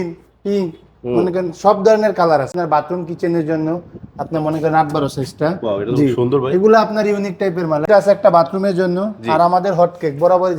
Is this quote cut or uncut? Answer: cut